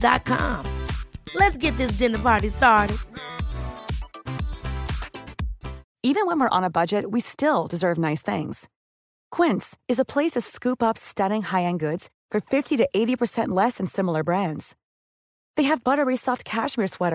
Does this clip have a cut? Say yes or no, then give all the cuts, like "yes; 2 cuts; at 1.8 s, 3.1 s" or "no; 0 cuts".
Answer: no; 0 cuts